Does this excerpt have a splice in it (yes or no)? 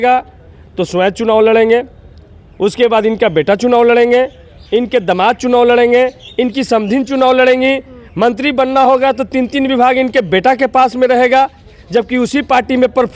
no